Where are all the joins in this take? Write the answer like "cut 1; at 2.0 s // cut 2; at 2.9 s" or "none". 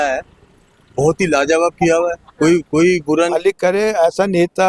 cut 1; at 3.3 s